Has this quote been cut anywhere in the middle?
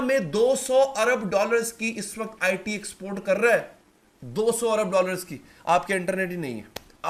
no; 0 cuts

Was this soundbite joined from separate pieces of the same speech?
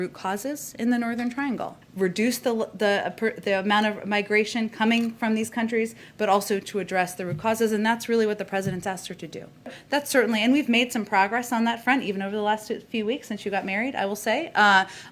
yes; 2 cuts; at 1.8 s, 9.8 s

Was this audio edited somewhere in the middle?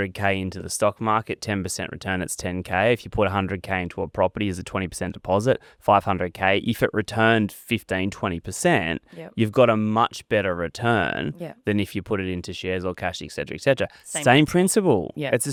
no; 0 cuts

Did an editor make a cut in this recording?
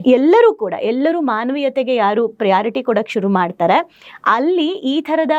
no; 0 cuts

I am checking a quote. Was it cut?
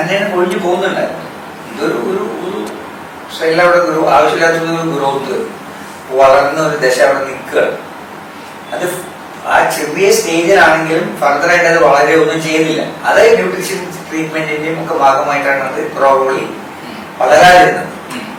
no; 0 cuts

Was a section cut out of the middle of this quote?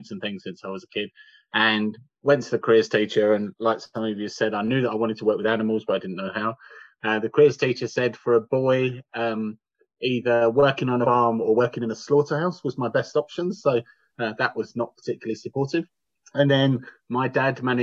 no; 0 cuts

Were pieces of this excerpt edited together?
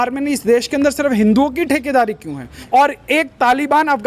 yes; 1 cut; at 2.6 s

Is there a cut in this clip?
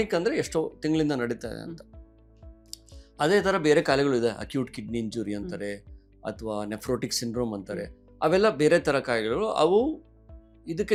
no; 0 cuts

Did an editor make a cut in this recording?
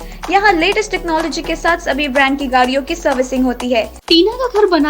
yes; 1 cut; at 4.0 s

